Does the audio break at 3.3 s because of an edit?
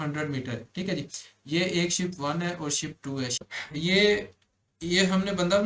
yes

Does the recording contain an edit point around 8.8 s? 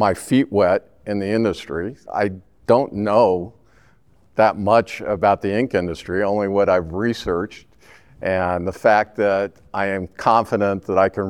no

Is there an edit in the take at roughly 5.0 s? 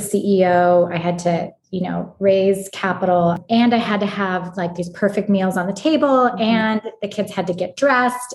no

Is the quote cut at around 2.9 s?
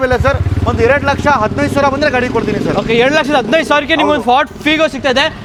no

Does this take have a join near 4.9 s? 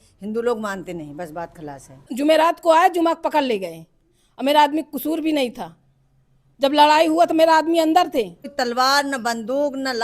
no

